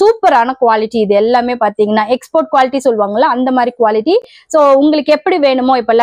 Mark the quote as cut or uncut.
uncut